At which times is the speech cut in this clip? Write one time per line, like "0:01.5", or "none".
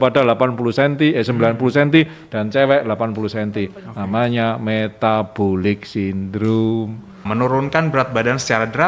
0:07.2